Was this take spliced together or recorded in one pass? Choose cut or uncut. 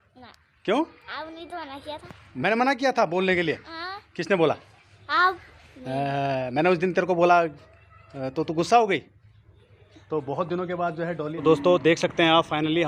cut